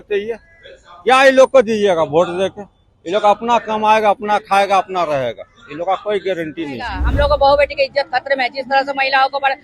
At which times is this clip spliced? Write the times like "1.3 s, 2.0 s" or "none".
7.0 s